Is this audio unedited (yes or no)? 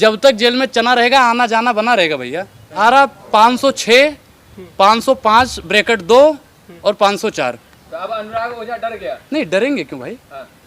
no